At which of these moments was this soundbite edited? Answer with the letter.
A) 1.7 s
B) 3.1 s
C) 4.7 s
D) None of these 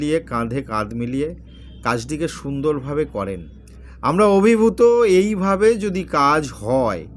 D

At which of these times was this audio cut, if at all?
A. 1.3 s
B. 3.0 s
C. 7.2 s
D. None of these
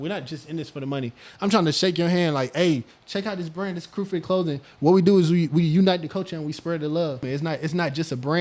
C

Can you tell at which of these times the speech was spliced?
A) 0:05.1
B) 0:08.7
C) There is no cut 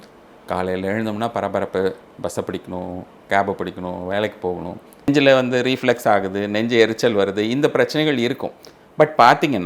A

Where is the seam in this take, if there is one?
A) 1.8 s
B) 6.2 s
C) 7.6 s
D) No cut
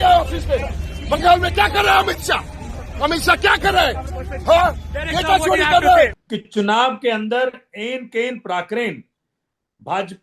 B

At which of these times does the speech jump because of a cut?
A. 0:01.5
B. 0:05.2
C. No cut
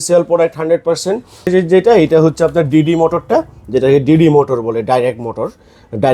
A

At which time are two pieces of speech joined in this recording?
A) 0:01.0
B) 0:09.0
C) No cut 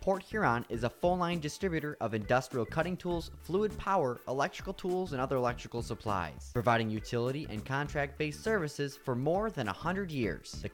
C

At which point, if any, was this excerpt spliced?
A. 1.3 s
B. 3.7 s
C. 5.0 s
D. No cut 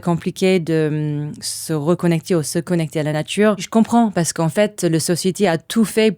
B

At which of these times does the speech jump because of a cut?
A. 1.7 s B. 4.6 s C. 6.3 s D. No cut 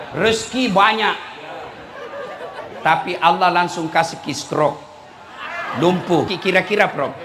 C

